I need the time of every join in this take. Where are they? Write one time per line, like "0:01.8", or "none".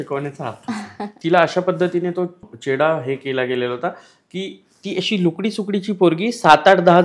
0:01.1
0:02.5

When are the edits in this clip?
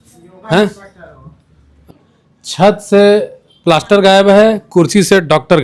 0:01.8

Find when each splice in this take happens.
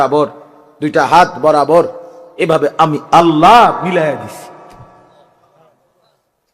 0:05.3

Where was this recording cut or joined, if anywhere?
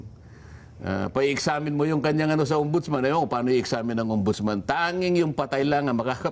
none

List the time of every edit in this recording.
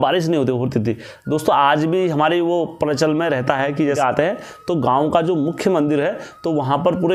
0:04.0

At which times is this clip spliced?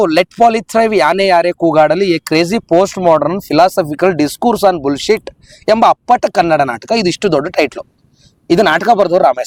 none

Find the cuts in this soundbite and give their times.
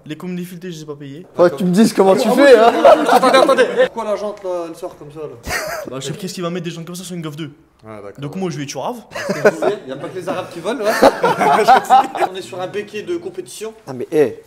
0:01.2
0:03.9
0:06.2
0:09.1
0:12.3

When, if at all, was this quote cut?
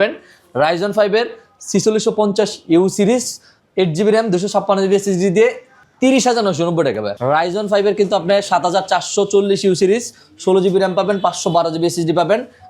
0:07.1

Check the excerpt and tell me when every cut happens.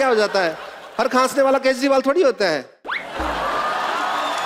none

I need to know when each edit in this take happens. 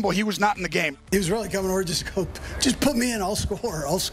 0:01.0

